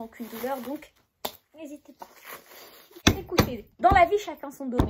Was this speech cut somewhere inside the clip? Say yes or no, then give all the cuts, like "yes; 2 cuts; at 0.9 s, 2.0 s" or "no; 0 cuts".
yes; 1 cut; at 2.9 s